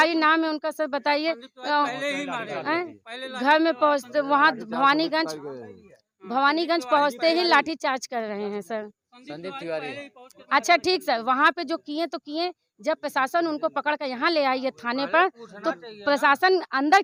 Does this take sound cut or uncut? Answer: uncut